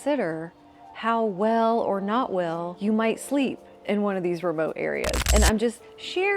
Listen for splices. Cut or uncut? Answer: cut